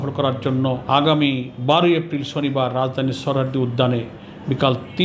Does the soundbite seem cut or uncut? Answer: cut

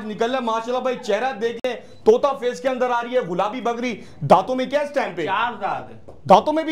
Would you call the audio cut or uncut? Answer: uncut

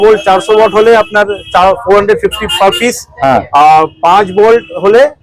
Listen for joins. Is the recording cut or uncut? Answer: uncut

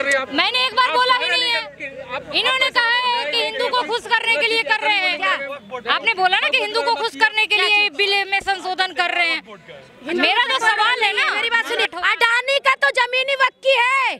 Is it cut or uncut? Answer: cut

